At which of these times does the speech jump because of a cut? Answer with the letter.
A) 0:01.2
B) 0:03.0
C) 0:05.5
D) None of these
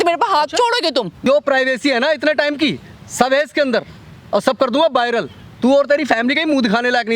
A